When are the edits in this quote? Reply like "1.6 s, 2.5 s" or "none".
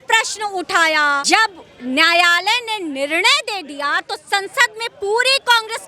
1.2 s